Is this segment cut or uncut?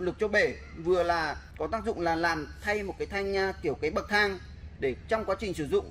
cut